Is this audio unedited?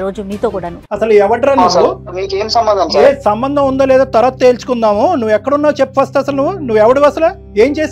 yes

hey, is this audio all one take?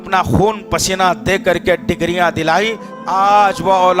no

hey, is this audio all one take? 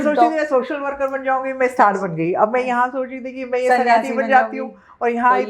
yes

